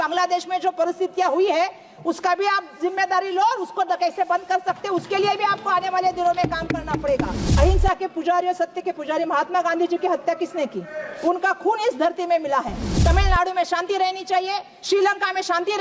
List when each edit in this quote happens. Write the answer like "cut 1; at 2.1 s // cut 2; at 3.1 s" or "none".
cut 1; at 7.4 s // cut 2; at 12.9 s